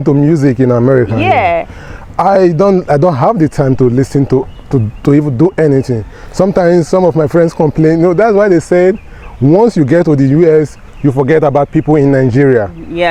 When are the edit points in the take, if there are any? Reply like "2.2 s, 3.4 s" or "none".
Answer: none